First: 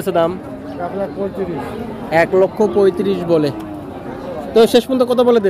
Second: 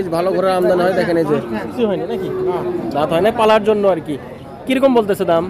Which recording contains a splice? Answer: second; 1 cut; at 1.8 s

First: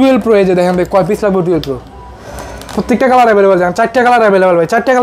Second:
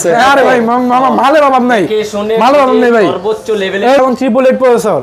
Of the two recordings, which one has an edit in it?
second; 1 cut; at 4.0 s

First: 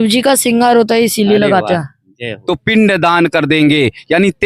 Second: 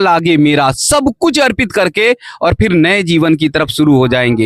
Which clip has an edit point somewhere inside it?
first; 1 cut; at 2.3 s

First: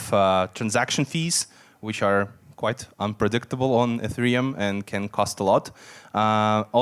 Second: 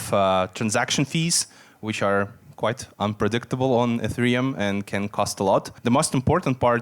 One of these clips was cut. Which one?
second; 1 cut; at 5.7 s

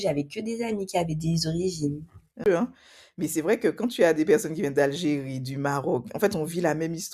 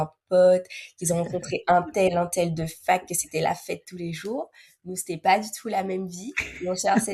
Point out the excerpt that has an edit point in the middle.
first; 1 cut; at 2.5 s

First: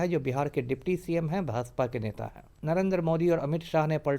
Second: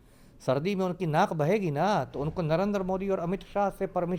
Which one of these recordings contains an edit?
first; 1 cut; at 2.5 s

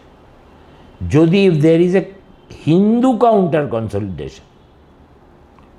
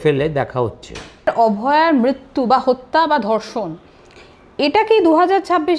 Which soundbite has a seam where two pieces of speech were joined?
second; 1 cut; at 1.3 s

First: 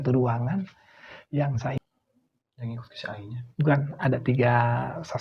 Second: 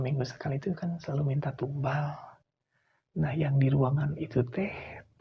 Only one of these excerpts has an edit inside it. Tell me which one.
first; 1 cut; at 1.7 s

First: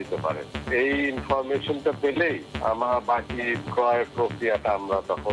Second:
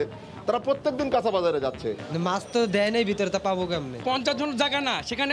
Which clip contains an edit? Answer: second; 2 cuts; at 2.0 s, 4.0 s

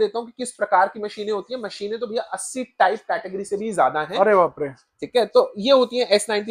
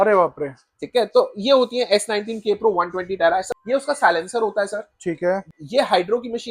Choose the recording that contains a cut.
second; 2 cuts; at 3.5 s, 5.5 s

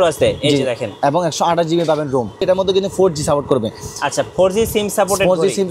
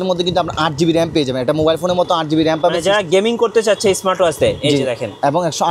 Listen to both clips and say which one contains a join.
first; 1 cut; at 2.4 s

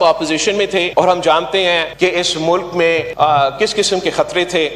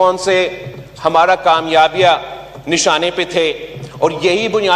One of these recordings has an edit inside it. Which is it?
first; 3 cuts; at 0.9 s, 1.9 s, 3.1 s

